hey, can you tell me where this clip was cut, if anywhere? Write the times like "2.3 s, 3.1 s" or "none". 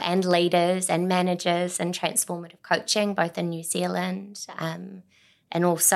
none